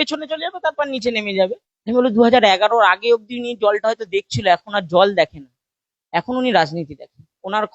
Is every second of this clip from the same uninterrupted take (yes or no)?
no